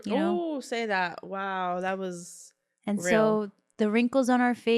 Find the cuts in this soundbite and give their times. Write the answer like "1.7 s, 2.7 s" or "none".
3.6 s